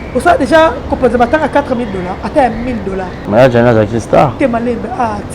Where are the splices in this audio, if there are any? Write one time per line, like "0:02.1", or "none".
0:03.1